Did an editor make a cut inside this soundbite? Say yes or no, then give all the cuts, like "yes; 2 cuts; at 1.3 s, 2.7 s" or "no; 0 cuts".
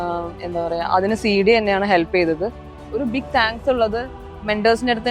yes; 1 cut; at 2.8 s